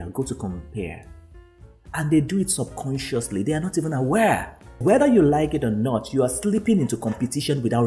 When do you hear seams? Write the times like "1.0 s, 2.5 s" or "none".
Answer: 4.8 s